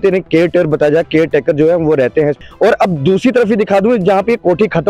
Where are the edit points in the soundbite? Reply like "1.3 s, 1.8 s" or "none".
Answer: 2.4 s